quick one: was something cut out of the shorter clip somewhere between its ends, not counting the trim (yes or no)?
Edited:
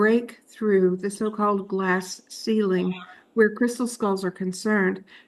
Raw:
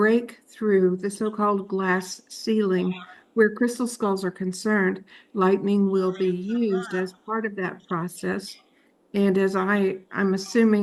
no